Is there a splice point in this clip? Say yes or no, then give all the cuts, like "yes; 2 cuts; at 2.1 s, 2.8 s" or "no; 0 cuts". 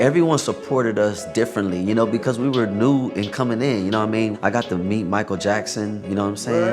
yes; 1 cut; at 4.3 s